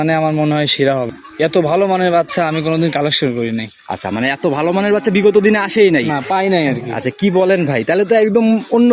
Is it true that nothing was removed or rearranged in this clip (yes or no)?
no